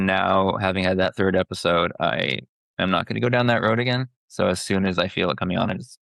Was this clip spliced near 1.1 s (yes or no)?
yes